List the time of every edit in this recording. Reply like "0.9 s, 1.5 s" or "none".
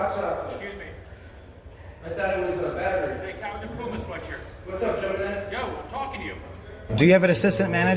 6.9 s